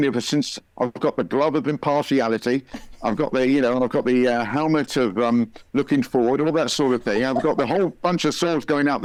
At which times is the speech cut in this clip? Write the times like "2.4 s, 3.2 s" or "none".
none